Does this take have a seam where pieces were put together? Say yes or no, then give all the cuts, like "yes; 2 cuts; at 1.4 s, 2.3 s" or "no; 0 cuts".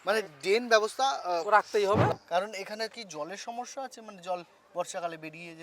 yes; 1 cut; at 2.1 s